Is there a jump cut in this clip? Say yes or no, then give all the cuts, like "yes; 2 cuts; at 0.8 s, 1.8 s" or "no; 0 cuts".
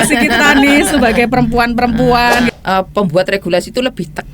yes; 1 cut; at 2.5 s